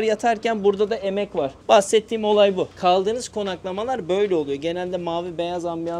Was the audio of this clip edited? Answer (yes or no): no